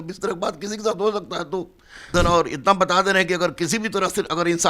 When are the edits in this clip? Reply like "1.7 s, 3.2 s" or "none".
2.1 s

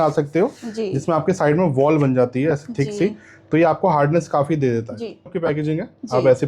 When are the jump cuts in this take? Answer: 5.3 s

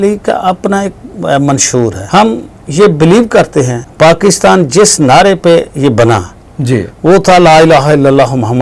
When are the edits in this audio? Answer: 2.0 s, 3.8 s

